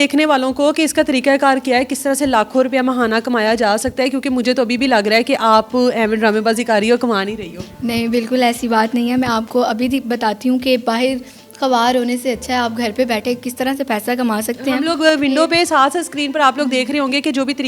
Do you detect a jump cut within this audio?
no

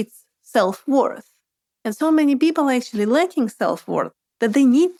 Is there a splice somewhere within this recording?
no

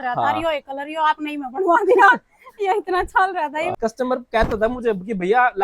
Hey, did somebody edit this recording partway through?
yes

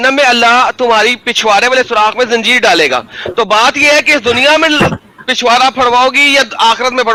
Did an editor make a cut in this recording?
no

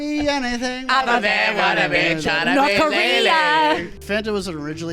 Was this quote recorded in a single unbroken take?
no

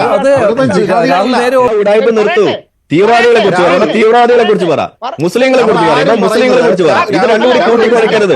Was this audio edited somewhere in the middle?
yes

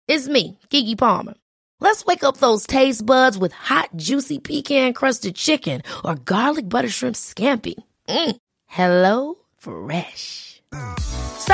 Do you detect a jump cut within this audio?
no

